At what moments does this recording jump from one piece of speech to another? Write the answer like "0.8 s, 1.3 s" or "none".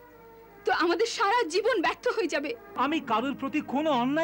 2.7 s

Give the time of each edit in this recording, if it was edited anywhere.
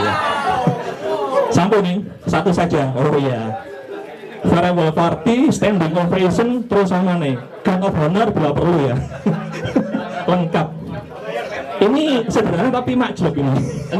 none

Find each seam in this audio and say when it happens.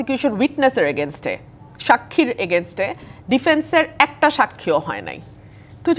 none

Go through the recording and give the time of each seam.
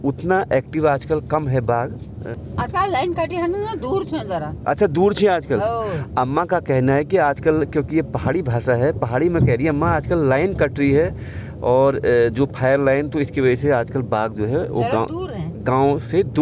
2.2 s

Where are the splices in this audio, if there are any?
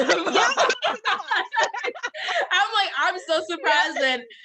1.5 s

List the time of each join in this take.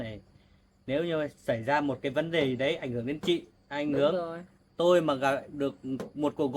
none

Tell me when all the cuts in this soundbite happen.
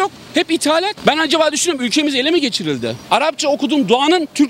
1.0 s, 3.0 s

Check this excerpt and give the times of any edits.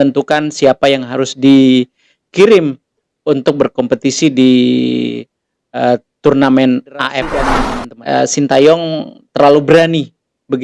7.5 s

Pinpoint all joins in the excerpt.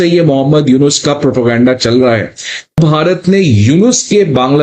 2.8 s

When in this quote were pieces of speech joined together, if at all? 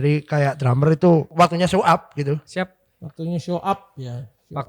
1.3 s

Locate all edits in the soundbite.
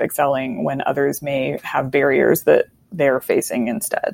2.8 s

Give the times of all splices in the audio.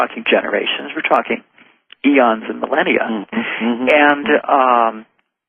1.3 s

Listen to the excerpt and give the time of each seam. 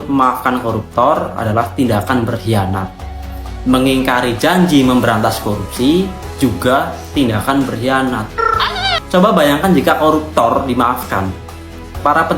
8.9 s

